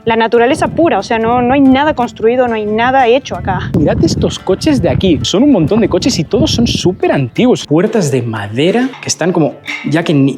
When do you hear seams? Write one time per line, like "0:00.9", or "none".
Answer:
0:03.7
0:05.2
0:07.6